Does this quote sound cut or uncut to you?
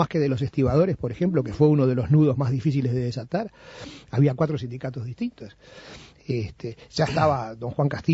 cut